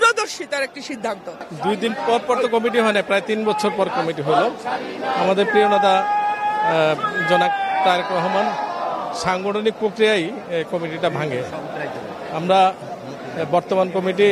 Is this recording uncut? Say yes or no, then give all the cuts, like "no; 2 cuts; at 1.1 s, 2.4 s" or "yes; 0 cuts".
yes; 0 cuts